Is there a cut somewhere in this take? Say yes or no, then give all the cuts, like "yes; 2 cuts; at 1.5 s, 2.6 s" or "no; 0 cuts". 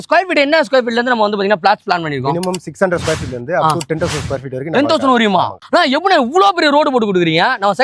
yes; 1 cut; at 5.6 s